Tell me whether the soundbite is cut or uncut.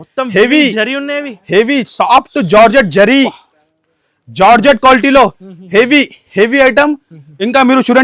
uncut